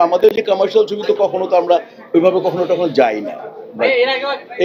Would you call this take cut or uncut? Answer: uncut